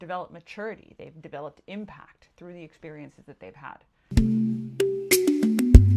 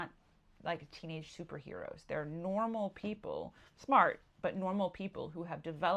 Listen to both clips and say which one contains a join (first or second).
first